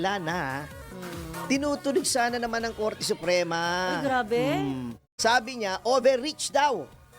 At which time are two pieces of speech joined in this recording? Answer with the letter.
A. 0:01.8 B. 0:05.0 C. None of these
B